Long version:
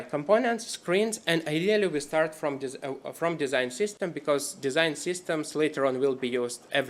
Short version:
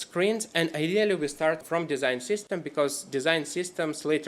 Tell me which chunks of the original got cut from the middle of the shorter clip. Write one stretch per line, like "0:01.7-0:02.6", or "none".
0:02.3-0:03.1